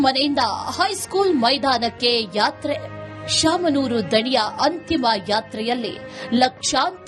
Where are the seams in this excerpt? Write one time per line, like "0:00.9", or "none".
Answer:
none